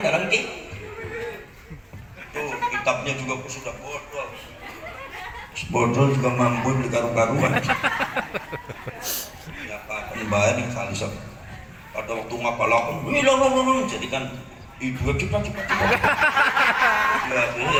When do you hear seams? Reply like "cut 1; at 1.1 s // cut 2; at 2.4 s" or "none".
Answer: none